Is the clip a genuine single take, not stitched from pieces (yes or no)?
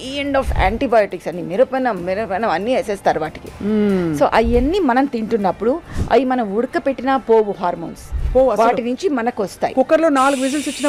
yes